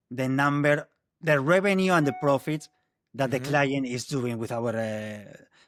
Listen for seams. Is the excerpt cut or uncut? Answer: uncut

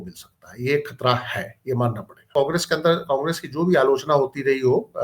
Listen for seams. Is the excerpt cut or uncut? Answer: cut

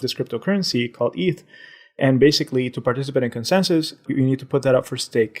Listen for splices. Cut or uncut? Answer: uncut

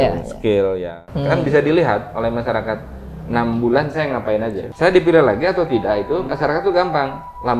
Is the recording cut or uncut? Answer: cut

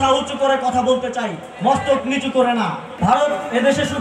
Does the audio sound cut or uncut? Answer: cut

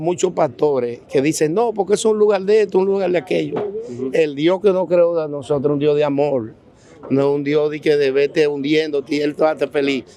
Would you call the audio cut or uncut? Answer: uncut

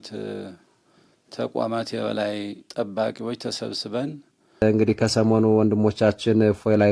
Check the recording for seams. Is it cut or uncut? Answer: cut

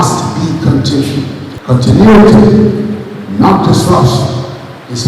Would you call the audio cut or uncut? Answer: cut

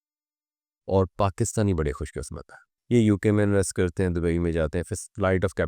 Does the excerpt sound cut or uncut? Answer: cut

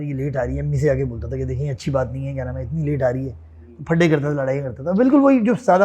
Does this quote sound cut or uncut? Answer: uncut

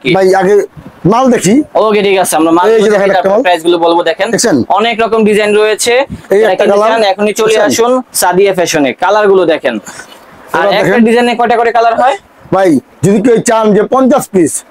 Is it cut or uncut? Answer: uncut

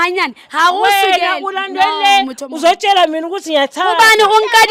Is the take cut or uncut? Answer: uncut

